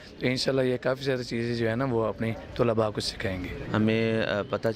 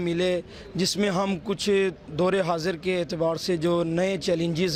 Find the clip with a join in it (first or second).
first